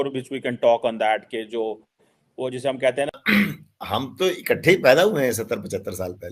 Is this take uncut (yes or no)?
no